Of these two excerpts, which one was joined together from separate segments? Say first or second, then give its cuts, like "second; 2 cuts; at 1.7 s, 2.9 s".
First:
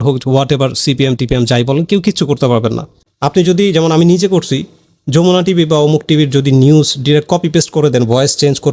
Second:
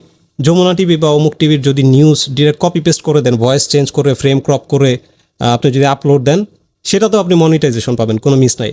first; 1 cut; at 3.5 s